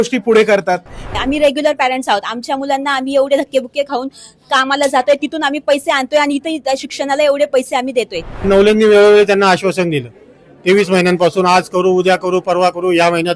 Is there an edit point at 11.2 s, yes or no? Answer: no